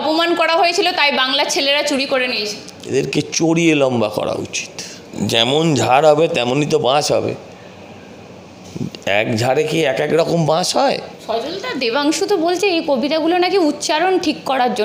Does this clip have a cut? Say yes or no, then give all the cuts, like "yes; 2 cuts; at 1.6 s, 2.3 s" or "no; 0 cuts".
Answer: yes; 3 cuts; at 2.7 s, 5.1 s, 11.1 s